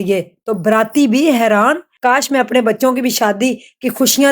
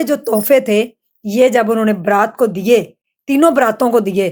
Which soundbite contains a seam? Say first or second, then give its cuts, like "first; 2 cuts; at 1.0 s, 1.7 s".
first; 1 cut; at 1.9 s